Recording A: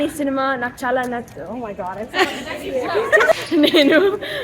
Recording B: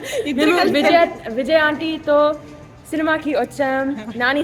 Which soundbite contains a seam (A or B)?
A